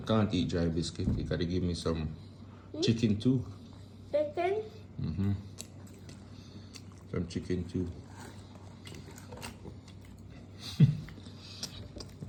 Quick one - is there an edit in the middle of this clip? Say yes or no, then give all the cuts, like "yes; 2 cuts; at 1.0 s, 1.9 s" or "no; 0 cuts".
no; 0 cuts